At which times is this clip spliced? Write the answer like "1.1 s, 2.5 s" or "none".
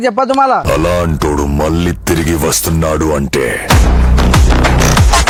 none